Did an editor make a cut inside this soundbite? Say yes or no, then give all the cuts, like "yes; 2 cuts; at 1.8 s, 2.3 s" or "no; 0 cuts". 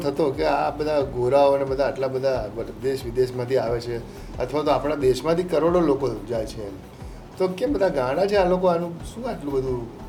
no; 0 cuts